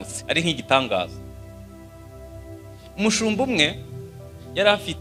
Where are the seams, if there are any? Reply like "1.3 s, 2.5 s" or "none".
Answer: none